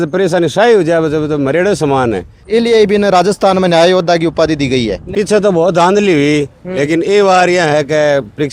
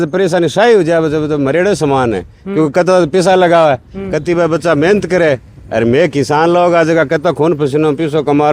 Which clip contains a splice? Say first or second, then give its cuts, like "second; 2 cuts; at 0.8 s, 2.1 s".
first; 2 cuts; at 2.4 s, 5.1 s